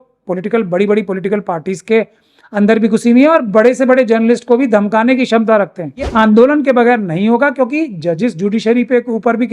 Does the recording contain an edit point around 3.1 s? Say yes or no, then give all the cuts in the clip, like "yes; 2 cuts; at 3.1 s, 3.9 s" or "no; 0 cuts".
no; 1 cut; at 6.1 s